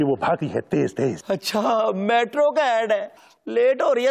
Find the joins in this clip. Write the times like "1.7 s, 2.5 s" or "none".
1.2 s